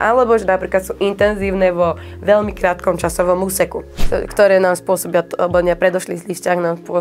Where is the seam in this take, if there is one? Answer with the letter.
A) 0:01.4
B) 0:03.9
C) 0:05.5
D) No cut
B